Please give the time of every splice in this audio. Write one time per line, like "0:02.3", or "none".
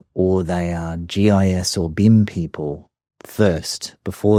none